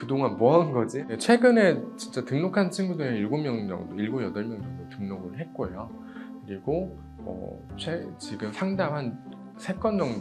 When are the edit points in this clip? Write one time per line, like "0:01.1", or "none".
0:01.0